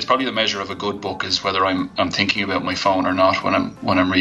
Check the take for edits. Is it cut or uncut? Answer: uncut